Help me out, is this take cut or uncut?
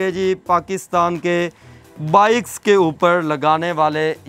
uncut